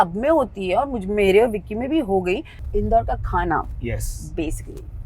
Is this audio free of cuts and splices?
no; 1 cut; at 2.6 s

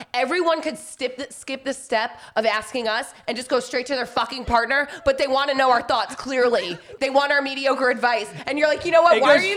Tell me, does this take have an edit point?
no; 0 cuts

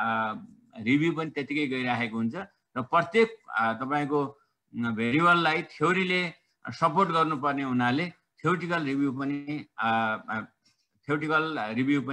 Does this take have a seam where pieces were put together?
no; 0 cuts

